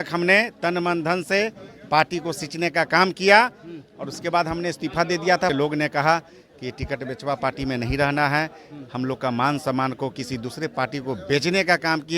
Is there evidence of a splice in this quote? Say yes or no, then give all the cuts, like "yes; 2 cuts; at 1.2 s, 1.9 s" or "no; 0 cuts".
yes; 1 cut; at 5.5 s